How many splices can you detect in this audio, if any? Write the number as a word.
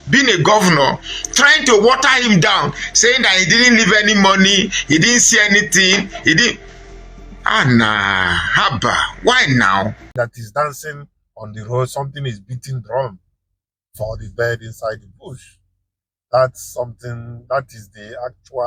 one